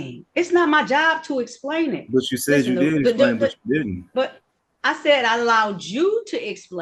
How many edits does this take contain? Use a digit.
0